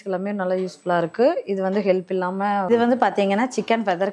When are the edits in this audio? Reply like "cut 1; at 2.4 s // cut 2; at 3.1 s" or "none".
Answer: cut 1; at 2.7 s